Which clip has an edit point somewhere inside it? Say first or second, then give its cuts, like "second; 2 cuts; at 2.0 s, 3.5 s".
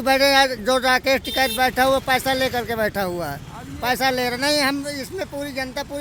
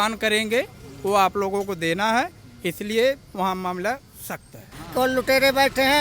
second; 1 cut; at 4.8 s